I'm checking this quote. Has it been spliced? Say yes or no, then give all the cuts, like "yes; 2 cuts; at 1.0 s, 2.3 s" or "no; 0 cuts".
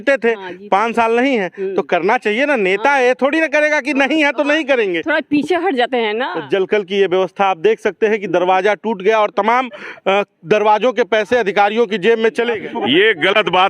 yes; 2 cuts; at 6.3 s, 12.6 s